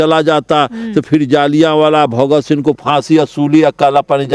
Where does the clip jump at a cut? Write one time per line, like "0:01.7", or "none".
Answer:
none